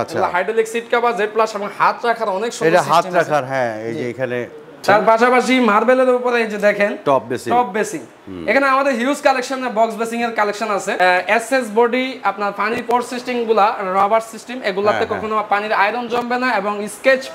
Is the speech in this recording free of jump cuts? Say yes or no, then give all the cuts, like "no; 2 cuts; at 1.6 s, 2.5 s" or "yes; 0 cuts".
no; 2 cuts; at 4.8 s, 10.9 s